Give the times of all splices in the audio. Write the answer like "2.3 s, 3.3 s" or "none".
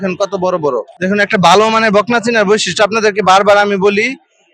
0.9 s